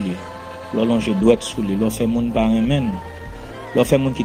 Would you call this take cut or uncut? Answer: uncut